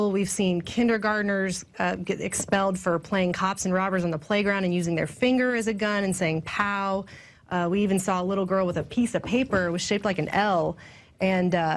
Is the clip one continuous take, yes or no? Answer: yes